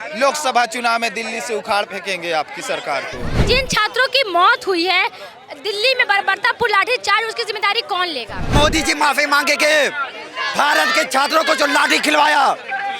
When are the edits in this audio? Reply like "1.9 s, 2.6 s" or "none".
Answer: 3.3 s, 8.5 s